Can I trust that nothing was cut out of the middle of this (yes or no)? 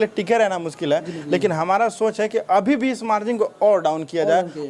yes